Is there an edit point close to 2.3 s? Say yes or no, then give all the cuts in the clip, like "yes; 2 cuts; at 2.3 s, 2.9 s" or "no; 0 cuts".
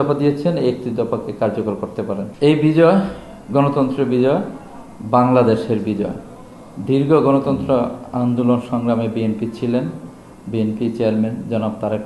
yes; 1 cut; at 2.3 s